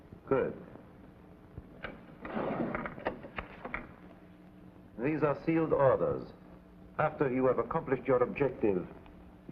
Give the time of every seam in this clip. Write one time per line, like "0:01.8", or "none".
0:08.1